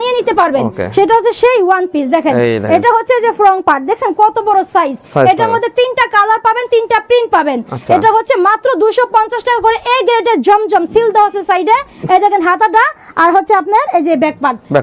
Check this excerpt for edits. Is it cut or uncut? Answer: uncut